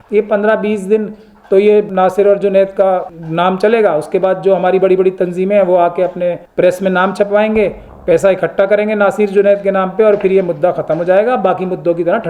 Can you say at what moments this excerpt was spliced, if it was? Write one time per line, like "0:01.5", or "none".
0:01.9
0:03.2
0:06.4